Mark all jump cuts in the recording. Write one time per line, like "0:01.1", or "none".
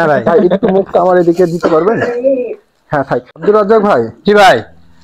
0:03.3